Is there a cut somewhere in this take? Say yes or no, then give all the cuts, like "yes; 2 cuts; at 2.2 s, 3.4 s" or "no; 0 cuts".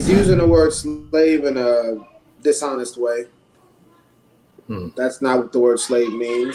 no; 0 cuts